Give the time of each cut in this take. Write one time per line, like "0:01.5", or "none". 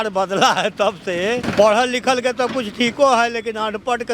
0:01.5